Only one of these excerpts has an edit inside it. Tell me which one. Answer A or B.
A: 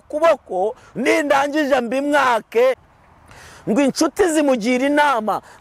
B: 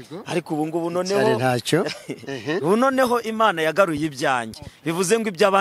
A